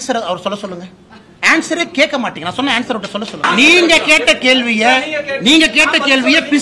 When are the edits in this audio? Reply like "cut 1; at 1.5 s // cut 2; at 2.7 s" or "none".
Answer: cut 1; at 3.4 s